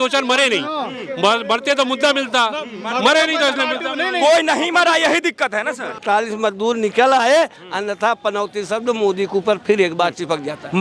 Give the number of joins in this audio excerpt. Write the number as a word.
one